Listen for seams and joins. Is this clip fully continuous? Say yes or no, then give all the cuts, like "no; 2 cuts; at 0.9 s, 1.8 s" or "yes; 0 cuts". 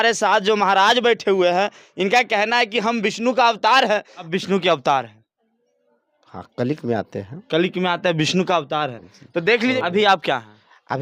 no; 2 cuts; at 4.2 s, 9.8 s